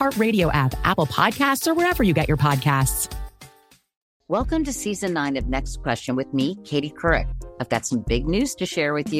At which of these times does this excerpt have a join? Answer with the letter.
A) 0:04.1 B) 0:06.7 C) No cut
A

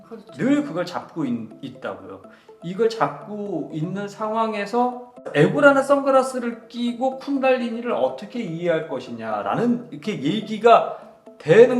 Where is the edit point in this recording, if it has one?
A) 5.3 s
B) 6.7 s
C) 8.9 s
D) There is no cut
A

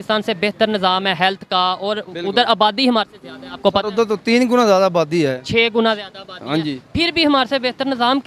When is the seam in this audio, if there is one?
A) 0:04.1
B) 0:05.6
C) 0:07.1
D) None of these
D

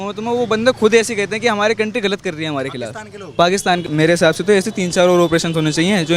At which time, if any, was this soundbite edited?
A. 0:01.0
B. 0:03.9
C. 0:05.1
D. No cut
B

